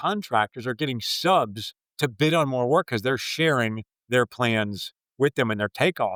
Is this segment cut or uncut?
uncut